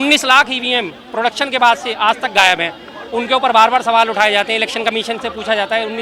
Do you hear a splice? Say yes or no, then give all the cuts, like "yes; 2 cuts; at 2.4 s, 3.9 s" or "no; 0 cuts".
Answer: no; 0 cuts